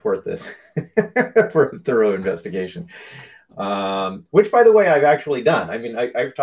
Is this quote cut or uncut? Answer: uncut